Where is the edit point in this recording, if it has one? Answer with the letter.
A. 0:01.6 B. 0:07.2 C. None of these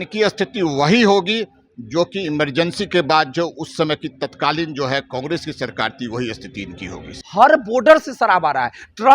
B